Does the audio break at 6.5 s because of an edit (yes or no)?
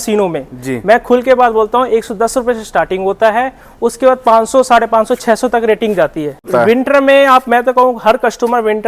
yes